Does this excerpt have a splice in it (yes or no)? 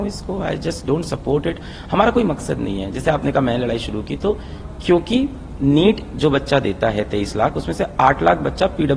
no